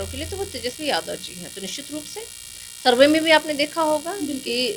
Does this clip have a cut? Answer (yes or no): no